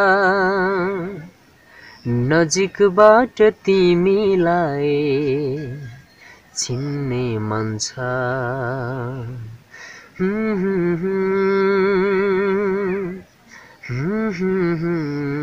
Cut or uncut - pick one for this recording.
uncut